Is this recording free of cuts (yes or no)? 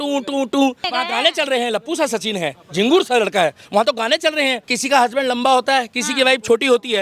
no